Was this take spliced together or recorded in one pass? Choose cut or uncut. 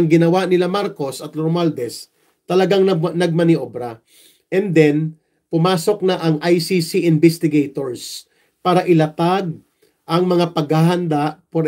uncut